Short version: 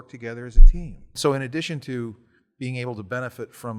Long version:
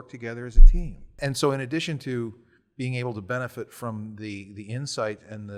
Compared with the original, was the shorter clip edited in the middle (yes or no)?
yes